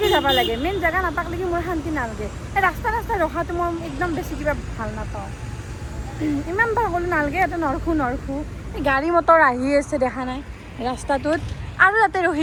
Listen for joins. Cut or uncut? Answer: uncut